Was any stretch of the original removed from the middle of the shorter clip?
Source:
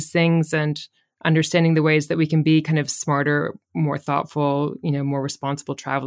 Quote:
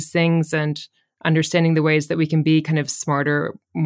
no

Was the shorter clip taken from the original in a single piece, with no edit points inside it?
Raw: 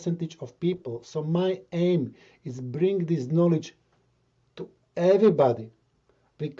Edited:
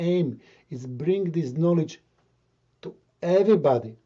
yes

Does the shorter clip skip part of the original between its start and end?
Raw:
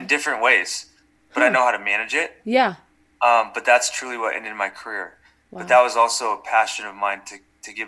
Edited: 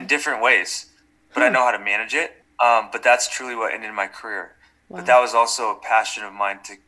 yes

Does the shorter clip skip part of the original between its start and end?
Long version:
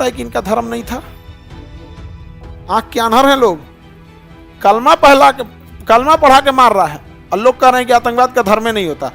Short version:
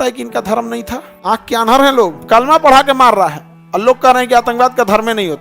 yes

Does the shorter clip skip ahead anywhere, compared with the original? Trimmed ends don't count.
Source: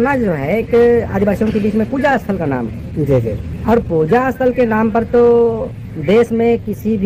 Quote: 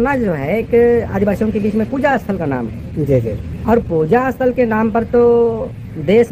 no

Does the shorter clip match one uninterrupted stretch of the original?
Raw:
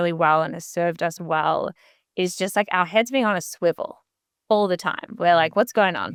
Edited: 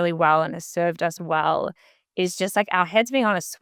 yes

